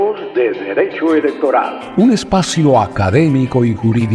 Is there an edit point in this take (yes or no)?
yes